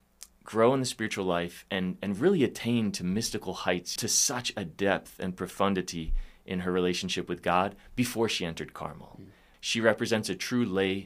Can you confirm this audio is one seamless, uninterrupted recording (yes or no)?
no